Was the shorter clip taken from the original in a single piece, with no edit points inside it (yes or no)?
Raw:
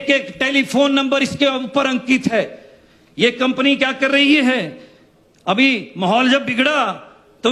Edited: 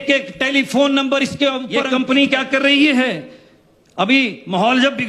no